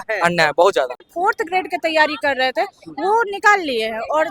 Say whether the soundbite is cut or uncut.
cut